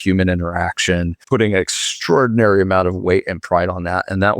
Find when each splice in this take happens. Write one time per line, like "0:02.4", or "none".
0:01.2